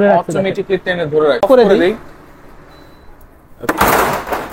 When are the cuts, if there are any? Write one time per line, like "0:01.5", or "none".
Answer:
0:01.4